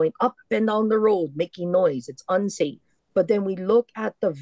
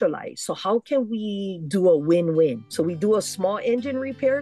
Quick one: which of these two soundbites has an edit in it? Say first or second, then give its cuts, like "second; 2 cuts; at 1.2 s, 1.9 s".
first; 1 cut; at 3.1 s